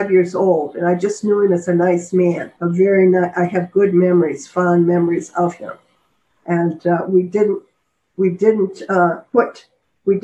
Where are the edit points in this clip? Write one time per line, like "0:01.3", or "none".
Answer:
none